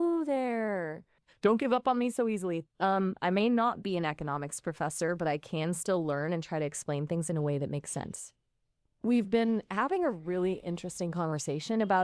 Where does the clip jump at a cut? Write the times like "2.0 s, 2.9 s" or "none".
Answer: 1.3 s

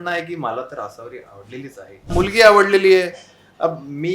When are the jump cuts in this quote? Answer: 2.1 s

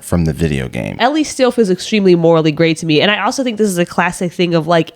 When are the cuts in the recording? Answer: 1.0 s

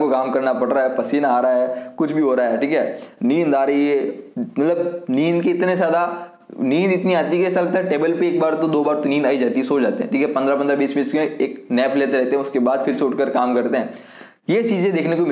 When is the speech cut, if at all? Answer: none

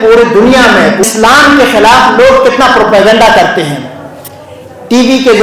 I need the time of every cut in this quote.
1.0 s

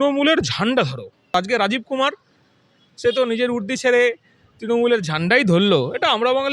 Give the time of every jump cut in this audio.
1.3 s

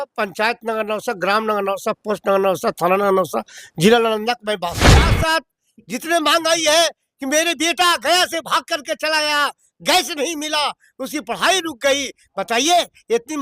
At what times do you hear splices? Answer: 5.2 s

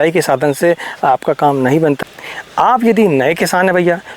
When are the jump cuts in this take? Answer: 2.0 s

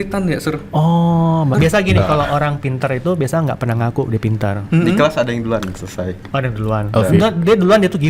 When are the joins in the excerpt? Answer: 1.5 s

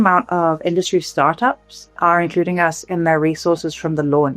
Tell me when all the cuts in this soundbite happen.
2.0 s

